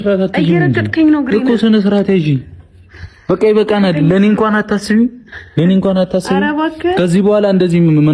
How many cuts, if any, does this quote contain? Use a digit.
0